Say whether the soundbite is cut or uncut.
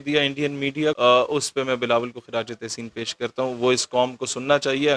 cut